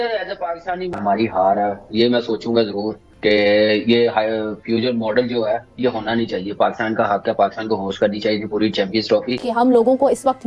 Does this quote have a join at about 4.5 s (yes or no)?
no